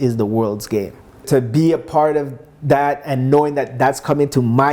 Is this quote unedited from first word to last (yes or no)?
no